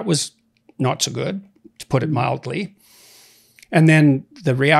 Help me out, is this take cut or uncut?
uncut